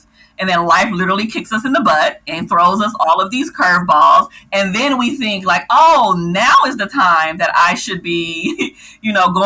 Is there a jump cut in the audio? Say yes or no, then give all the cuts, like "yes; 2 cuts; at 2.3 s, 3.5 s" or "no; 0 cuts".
no; 0 cuts